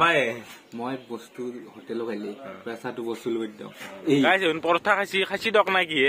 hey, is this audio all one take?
no; 1 cut; at 4.3 s

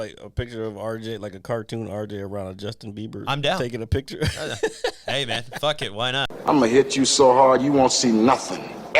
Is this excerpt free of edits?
no; 1 cut; at 6.3 s

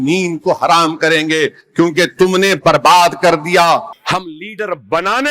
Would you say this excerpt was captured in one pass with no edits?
no; 1 cut; at 3.9 s

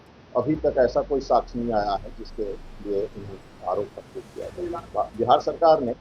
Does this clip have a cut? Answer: yes; 1 cut; at 4.8 s

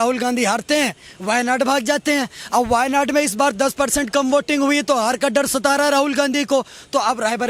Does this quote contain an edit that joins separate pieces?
no; 0 cuts

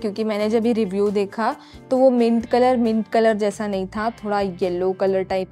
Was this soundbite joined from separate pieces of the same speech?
no; 0 cuts

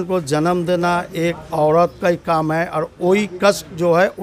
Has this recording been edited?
no; 0 cuts

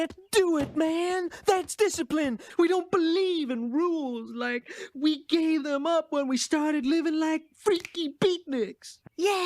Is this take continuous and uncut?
no; 1 cut; at 2.4 s

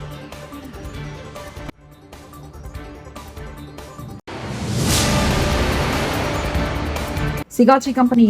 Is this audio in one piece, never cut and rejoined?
no; 1 cut; at 7.3 s

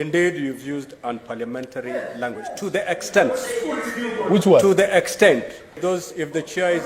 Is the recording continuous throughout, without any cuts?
no; 1 cut; at 5.8 s

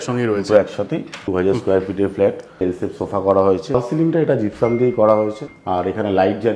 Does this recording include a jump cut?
yes; 4 cuts; at 1.2 s, 2.6 s, 3.7 s, 5.5 s

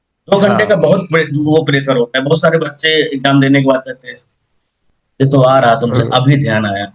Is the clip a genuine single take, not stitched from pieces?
yes; 0 cuts

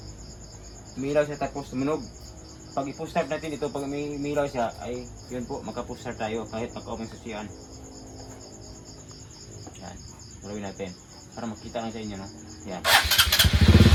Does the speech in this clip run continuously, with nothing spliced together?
yes; 0 cuts

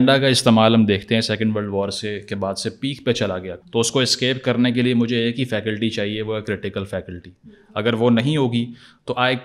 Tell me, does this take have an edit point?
yes; 1 cut; at 3.5 s

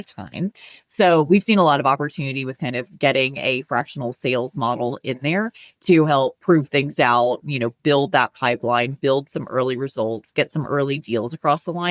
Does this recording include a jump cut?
no; 0 cuts

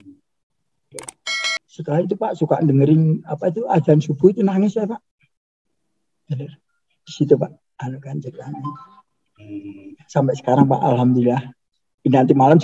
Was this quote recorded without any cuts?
no; 1 cut; at 1.4 s

